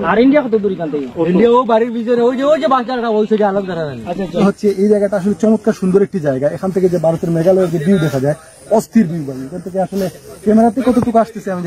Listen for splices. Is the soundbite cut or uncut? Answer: cut